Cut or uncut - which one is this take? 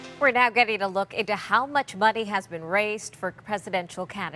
uncut